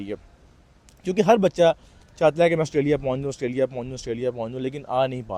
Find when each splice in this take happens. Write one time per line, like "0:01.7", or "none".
none